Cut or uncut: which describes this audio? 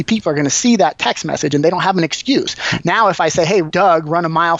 cut